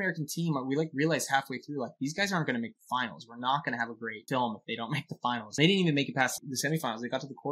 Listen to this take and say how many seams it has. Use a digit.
3